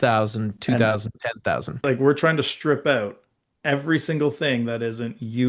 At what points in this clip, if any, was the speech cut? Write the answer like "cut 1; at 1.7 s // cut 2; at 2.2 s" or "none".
cut 1; at 1.8 s